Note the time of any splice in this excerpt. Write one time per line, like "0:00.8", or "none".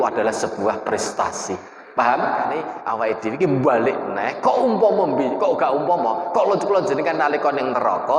0:02.7